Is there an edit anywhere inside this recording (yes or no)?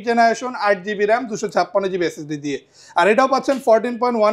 no